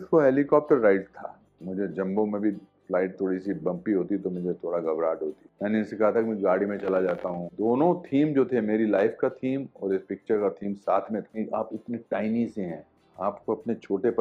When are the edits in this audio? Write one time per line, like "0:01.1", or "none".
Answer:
0:01.4
0:02.7
0:05.5
0:07.4
0:11.3

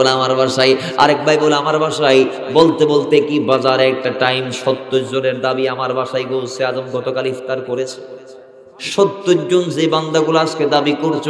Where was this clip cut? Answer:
0:08.7

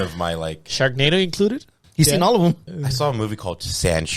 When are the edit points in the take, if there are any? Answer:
0:01.8
0:02.7

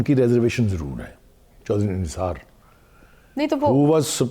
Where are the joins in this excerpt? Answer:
0:01.5

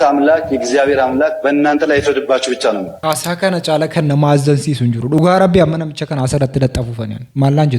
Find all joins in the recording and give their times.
0:02.9

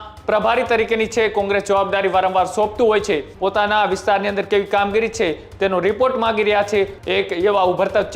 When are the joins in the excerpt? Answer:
0:03.3
0:07.0

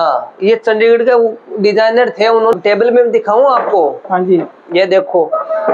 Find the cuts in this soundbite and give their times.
0:02.5

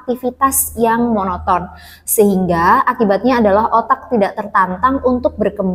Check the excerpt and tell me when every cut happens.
none

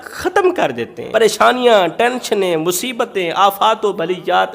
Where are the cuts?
0:00.9

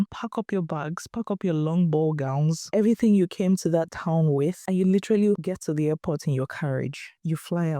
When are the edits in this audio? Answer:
none

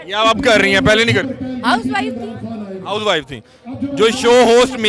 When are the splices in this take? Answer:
none

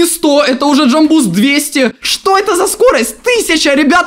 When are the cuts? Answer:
0:02.0

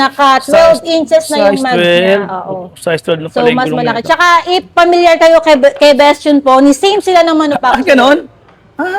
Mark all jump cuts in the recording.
none

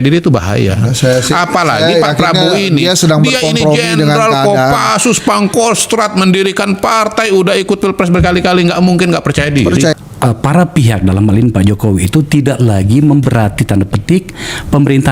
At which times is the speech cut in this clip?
0:09.9

